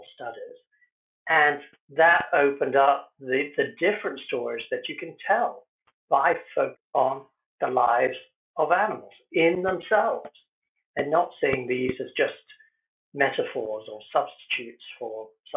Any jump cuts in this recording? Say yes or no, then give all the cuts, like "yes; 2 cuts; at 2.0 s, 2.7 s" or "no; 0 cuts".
yes; 1 cut; at 6.8 s